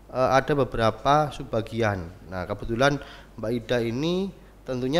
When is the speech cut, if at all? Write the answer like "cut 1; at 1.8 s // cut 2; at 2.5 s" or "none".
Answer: none